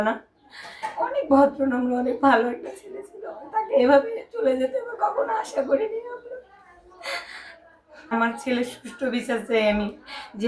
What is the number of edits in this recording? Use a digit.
1